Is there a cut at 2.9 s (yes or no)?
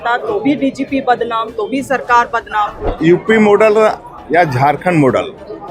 yes